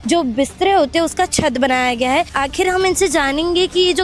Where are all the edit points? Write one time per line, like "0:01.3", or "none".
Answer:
0:02.4